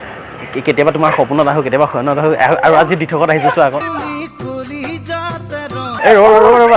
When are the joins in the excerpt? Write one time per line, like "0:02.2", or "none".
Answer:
none

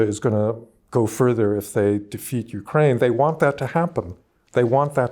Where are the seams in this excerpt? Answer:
none

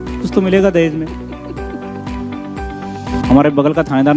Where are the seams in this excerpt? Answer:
0:03.2

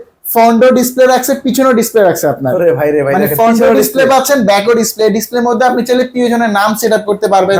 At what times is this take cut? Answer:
none

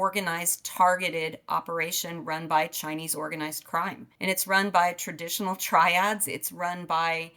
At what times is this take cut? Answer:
none

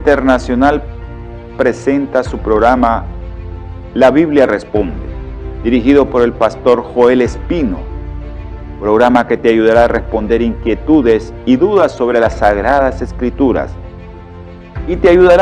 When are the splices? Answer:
0:01.8

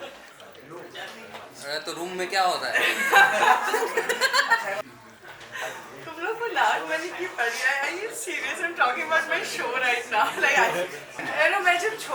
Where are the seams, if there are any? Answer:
0:04.8
0:11.2

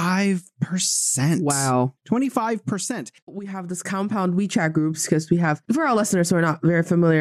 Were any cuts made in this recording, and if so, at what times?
0:03.5

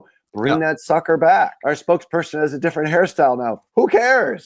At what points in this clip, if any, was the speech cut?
0:01.6

